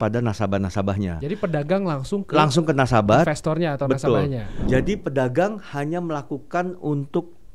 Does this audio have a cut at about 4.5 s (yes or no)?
yes